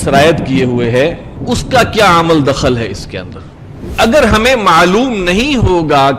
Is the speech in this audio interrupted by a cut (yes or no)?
yes